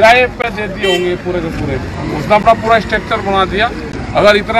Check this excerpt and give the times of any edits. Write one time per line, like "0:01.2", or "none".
none